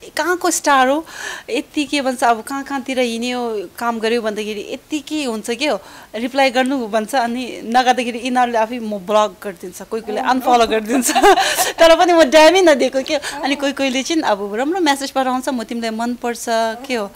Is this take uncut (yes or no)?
yes